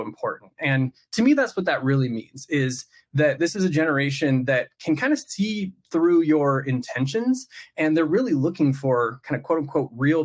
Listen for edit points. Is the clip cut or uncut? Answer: uncut